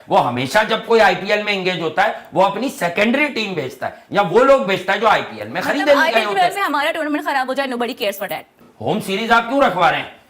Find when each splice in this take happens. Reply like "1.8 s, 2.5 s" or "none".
none